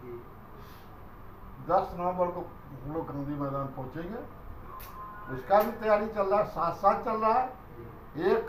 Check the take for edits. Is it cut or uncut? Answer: uncut